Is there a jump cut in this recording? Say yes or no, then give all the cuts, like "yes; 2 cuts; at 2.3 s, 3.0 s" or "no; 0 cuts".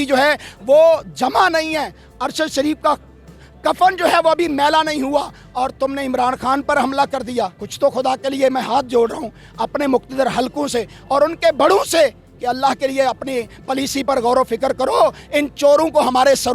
no; 0 cuts